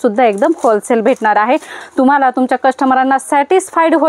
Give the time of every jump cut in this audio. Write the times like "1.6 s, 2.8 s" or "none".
1.7 s